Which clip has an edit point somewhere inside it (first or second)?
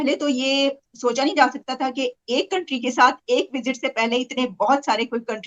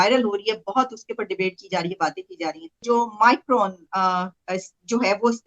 second